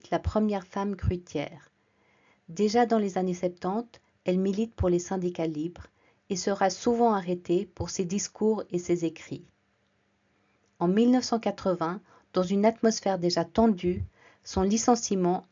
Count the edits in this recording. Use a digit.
0